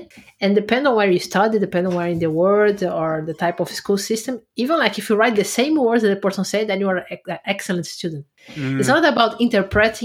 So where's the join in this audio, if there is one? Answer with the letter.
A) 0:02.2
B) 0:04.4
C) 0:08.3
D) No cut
C